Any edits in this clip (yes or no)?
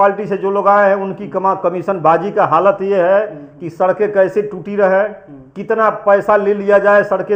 no